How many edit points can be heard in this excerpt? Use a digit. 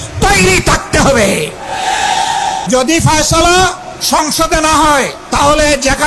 3